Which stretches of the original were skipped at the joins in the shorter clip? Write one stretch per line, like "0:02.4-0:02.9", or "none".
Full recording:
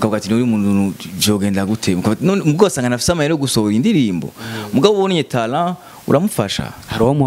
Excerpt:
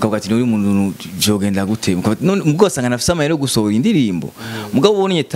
none